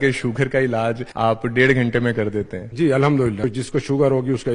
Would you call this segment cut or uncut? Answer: cut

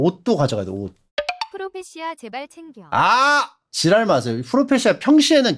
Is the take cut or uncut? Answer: cut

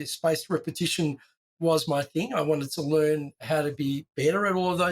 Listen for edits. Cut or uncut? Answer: cut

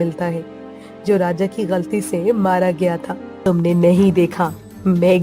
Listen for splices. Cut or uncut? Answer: cut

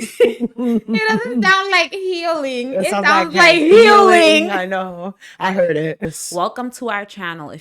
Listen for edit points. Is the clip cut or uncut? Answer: cut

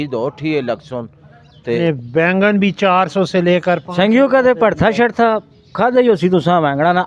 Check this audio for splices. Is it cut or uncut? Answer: cut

